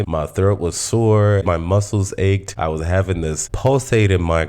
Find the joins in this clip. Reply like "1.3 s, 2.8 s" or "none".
1.4 s, 2.5 s